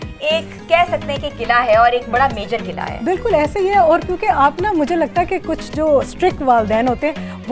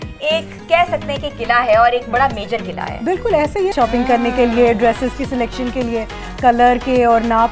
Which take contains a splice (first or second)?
second